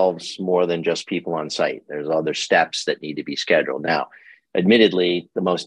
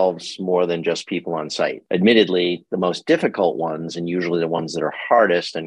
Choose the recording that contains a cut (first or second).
second